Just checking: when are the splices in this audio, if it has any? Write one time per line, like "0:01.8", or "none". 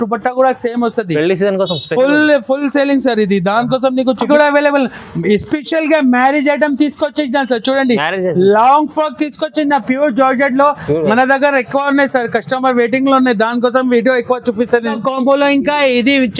0:04.3
0:14.9